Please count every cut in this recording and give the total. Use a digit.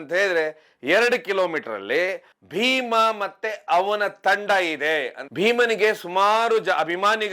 1